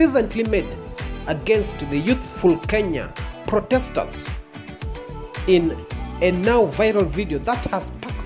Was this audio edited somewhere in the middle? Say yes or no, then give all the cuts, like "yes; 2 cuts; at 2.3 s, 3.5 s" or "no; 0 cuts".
no; 0 cuts